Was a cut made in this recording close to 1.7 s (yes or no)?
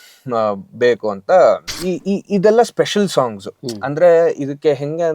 yes